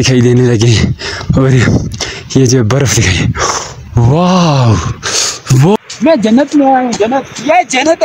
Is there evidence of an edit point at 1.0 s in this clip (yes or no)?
no